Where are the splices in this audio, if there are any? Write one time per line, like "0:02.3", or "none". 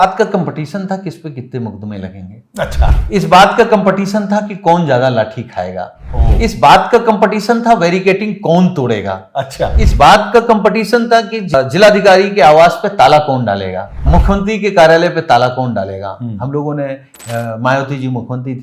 0:11.5
0:14.1